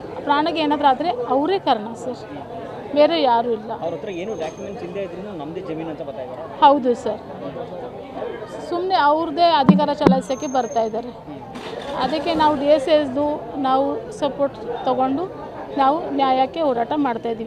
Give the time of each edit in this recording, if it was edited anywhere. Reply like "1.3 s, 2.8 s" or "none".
none

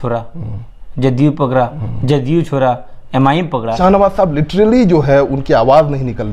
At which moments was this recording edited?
3.8 s

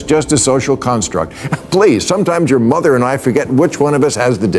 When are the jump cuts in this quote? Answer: none

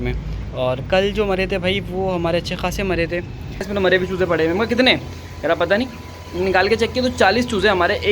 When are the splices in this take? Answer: 3.7 s

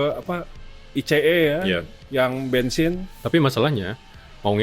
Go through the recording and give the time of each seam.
3.1 s

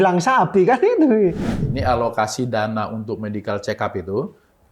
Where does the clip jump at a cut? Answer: 1.5 s

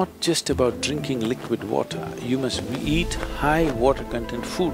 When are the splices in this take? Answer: none

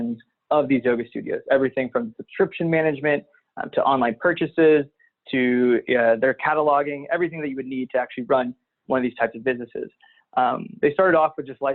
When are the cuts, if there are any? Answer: none

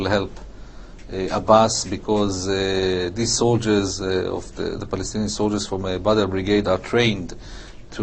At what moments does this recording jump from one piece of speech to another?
none

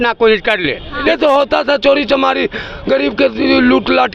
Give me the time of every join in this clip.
1.0 s

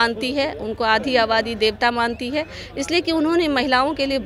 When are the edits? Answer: none

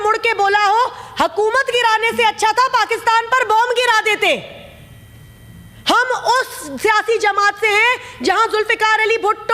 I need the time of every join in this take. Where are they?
none

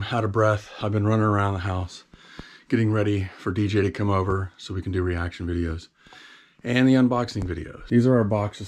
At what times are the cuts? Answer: none

